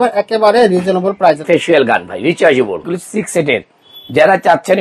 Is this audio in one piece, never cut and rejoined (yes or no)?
no